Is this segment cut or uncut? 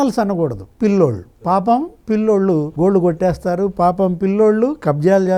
uncut